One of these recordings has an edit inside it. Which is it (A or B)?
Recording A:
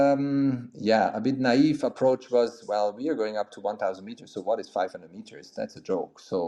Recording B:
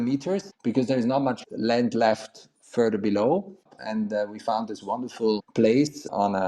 B